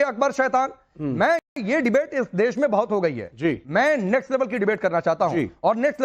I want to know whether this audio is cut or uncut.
uncut